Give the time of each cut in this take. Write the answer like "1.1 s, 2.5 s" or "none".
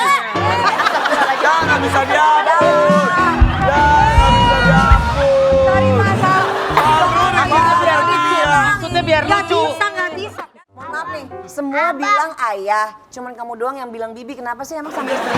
10.4 s